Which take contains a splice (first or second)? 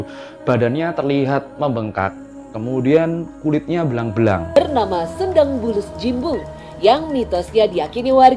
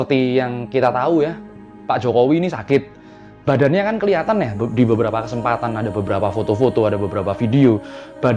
first